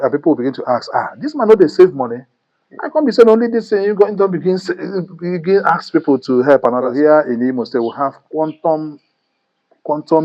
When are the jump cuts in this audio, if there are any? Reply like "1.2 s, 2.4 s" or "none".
6.9 s

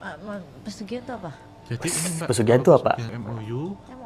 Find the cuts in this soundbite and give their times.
3.1 s

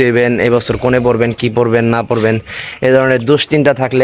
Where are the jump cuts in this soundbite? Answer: none

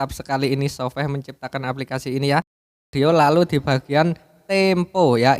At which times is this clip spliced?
2.9 s

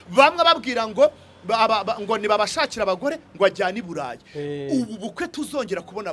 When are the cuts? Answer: none

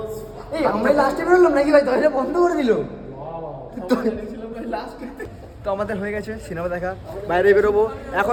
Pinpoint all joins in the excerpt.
none

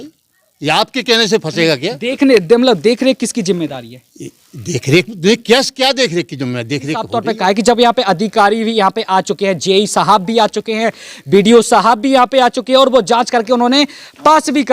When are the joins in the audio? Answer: 7.1 s

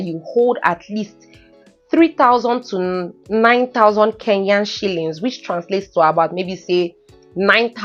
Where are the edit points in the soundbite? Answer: none

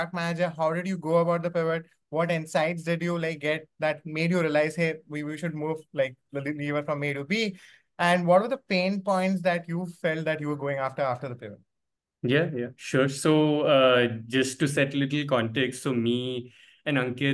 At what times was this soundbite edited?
none

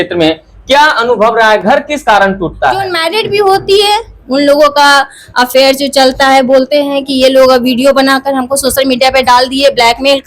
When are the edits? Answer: 3.0 s

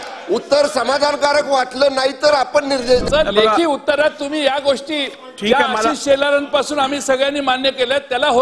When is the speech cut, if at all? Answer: 3.0 s

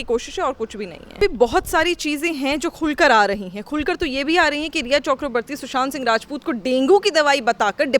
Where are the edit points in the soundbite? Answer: 1.2 s

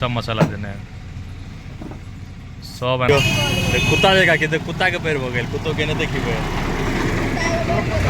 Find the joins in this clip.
3.1 s

